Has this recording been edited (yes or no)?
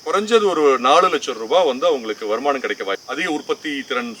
yes